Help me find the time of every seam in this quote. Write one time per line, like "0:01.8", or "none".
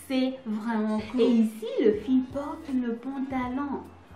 0:01.1